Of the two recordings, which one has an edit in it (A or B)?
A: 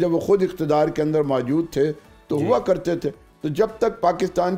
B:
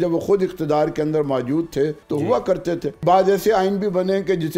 B